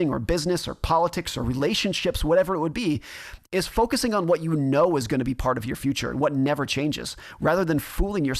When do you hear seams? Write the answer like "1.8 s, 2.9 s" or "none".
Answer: none